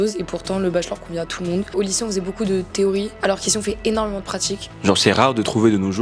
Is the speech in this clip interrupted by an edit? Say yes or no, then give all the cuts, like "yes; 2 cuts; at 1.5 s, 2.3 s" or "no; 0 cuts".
yes; 2 cuts; at 1.7 s, 4.7 s